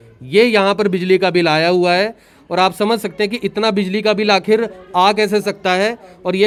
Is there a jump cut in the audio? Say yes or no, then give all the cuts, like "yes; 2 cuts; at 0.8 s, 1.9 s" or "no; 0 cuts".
no; 0 cuts